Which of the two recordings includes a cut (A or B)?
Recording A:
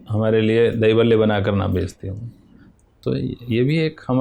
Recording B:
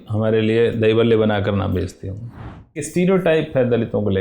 B